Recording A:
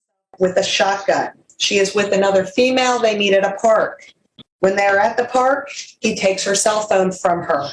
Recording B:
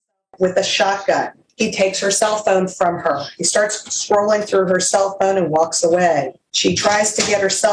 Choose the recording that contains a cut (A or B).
B